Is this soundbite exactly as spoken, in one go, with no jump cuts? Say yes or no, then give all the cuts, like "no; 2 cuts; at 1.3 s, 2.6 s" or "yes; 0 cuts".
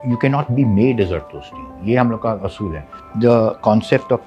no; 1 cut; at 3.0 s